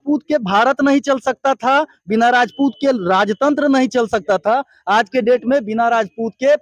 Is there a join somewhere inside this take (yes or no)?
no